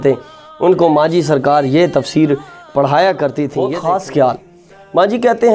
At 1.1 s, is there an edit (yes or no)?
no